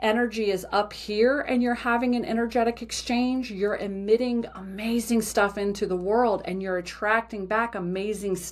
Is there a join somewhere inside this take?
no; 0 cuts

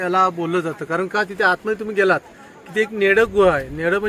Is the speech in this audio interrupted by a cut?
no; 0 cuts

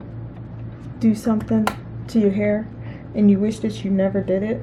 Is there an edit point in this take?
no; 0 cuts

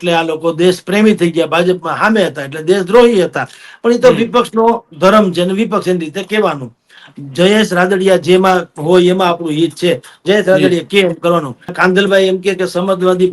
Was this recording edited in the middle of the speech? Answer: yes; 2 cuts; at 7.0 s, 11.7 s

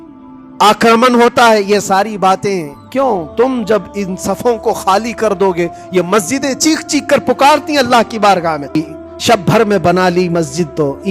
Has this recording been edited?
yes; 1 cut; at 8.8 s

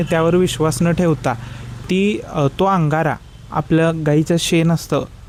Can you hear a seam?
no; 0 cuts

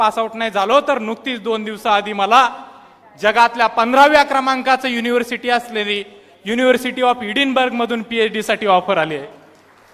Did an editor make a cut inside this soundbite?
no; 0 cuts

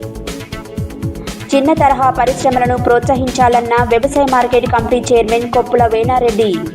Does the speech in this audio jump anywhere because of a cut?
yes; 1 cut; at 0.9 s

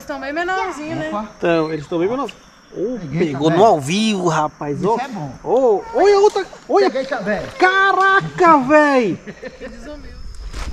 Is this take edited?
yes; 1 cut; at 9.8 s

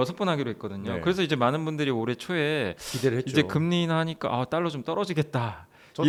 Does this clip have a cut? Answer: no; 0 cuts

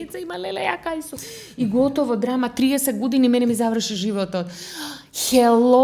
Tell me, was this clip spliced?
no; 0 cuts

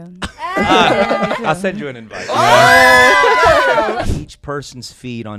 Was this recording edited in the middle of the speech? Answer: yes; 1 cut; at 3.9 s

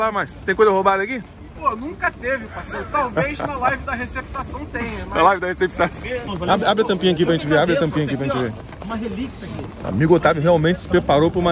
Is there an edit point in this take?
yes; 2 cuts; at 1.2 s, 6.3 s

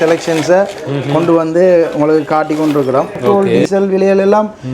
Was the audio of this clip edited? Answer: yes; 1 cut; at 3.2 s

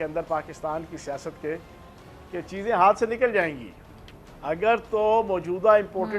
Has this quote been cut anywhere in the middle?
no; 0 cuts

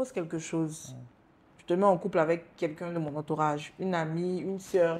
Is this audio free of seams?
yes; 0 cuts

